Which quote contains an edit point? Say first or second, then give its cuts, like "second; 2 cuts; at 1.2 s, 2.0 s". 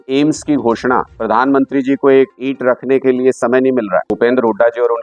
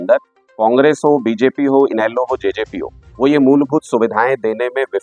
first; 3 cuts; at 1.1 s, 2.4 s, 4.1 s